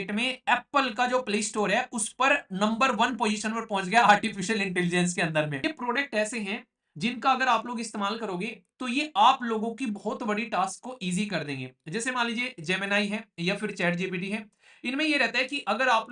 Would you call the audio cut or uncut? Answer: cut